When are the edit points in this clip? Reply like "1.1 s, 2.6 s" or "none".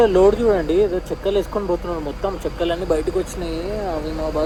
none